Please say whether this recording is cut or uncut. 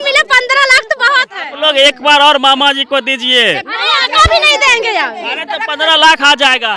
cut